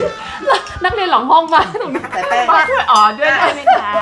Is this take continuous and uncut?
yes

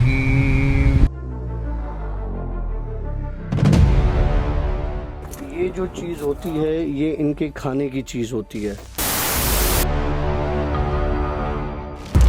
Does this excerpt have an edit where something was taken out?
no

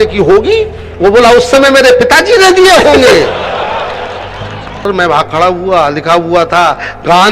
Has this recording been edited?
yes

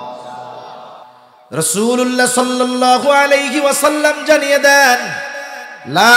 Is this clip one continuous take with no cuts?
no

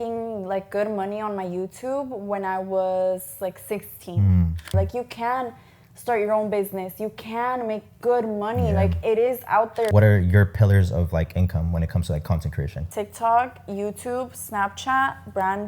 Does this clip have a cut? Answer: yes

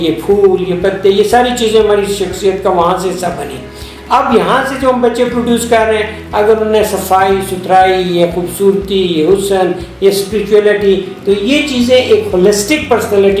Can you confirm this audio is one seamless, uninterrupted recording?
yes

